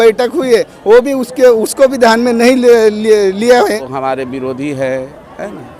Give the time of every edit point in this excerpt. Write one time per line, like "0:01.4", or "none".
0:03.9